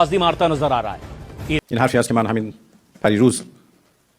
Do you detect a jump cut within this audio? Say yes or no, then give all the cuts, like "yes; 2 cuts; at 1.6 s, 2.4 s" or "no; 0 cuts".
yes; 1 cut; at 1.6 s